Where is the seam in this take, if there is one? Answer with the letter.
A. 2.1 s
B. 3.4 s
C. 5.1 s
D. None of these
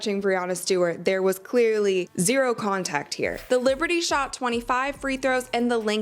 B